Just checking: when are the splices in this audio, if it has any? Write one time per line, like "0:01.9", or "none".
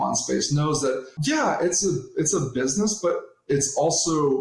0:01.1